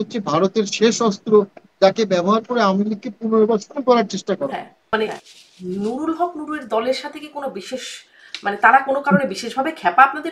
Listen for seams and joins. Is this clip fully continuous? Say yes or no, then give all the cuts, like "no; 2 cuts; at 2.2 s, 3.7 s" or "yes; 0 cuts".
no; 1 cut; at 4.7 s